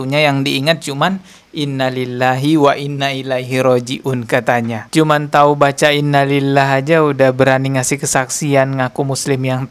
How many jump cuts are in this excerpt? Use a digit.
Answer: 1